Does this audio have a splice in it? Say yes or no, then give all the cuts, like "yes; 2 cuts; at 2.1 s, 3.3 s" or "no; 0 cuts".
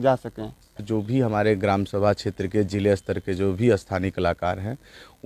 yes; 1 cut; at 0.9 s